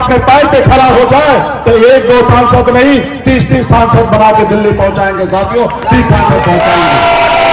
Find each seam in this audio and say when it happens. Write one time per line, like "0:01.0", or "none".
none